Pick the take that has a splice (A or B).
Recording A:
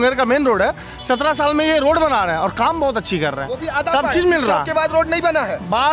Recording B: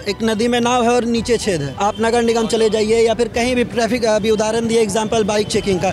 B